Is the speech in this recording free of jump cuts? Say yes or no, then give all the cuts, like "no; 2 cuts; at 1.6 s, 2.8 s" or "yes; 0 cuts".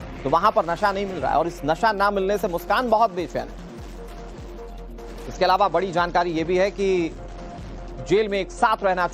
no; 1 cut; at 5.2 s